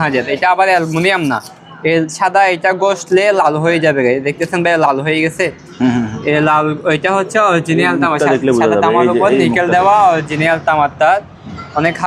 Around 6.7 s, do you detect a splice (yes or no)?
no